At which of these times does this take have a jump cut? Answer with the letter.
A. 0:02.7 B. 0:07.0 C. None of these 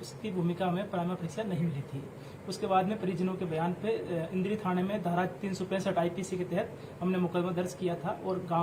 C